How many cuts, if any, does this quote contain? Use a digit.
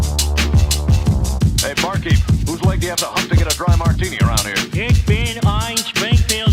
1